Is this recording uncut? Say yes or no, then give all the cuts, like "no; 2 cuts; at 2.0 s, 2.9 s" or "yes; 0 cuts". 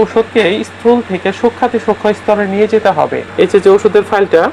no; 1 cut; at 3.2 s